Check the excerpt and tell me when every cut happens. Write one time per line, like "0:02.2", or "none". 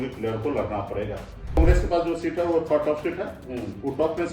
0:01.6